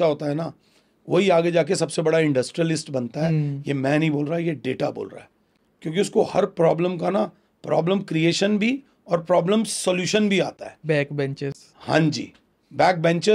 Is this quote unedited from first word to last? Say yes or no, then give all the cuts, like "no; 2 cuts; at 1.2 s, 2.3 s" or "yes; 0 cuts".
yes; 0 cuts